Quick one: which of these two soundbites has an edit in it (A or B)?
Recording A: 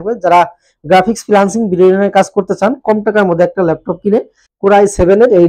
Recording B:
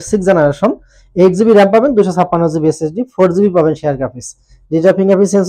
A